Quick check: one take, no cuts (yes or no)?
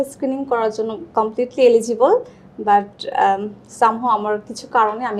yes